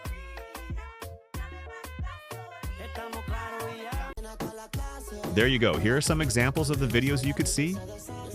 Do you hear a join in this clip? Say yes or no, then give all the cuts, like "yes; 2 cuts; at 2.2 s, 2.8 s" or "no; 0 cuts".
yes; 1 cut; at 4.1 s